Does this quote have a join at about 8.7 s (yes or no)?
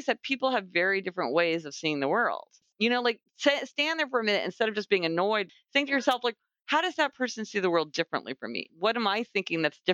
yes